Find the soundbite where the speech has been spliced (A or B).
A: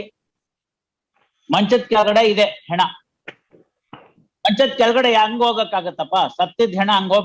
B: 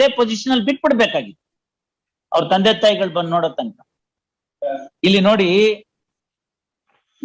B